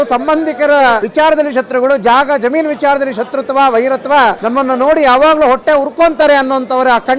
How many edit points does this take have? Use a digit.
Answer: 2